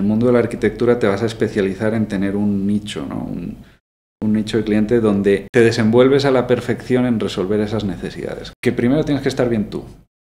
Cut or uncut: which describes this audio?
cut